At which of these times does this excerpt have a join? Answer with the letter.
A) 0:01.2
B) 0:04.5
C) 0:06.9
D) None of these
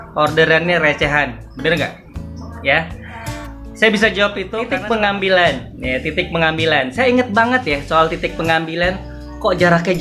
B